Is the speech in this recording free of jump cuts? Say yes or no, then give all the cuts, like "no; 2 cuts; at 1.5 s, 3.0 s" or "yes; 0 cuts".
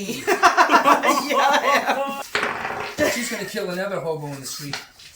no; 1 cut; at 2.2 s